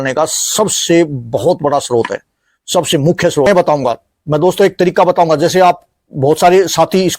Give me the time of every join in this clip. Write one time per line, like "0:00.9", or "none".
0:03.5